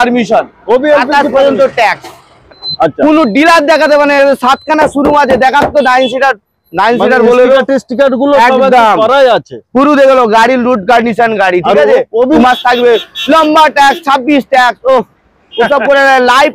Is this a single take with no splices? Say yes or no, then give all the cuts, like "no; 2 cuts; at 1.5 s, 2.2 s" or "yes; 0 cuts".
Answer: no; 2 cuts; at 2.6 s, 12.4 s